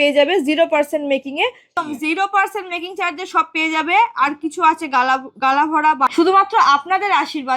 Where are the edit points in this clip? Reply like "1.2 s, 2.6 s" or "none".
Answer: 1.7 s, 6.1 s